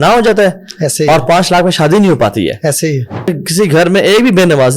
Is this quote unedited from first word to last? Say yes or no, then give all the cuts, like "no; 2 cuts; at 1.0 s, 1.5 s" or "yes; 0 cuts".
no; 1 cut; at 3.3 s